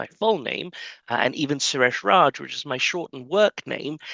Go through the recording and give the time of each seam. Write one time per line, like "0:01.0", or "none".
none